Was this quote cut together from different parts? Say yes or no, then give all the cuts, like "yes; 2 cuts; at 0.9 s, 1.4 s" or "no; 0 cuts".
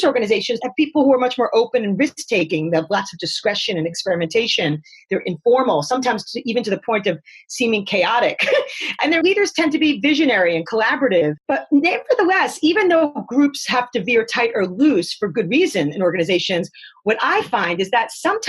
no; 0 cuts